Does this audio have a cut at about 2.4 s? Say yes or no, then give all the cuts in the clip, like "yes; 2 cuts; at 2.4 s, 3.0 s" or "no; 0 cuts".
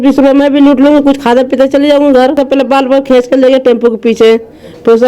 yes; 1 cut; at 2.4 s